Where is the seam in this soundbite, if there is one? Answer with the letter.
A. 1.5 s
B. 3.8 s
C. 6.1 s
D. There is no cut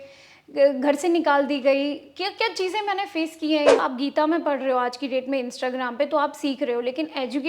B